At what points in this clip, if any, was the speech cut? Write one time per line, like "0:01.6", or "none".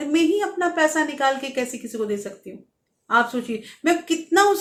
none

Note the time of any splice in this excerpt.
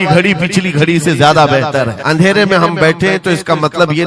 0:02.0

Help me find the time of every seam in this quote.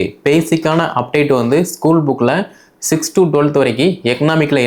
none

